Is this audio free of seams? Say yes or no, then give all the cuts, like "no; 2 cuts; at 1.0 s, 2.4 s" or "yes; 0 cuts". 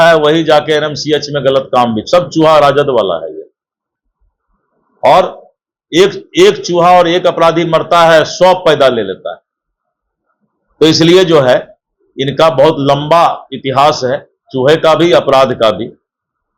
yes; 0 cuts